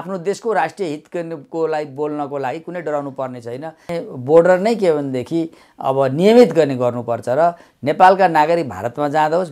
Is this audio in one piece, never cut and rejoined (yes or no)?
no